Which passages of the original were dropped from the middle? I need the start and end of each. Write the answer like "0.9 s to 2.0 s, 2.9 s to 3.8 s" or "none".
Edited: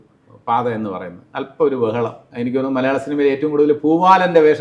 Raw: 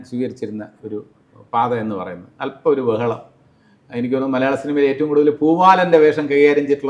3.3 s to 3.8 s